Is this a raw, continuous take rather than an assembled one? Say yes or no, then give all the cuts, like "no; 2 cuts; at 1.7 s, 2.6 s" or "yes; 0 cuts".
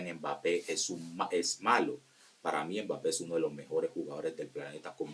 yes; 0 cuts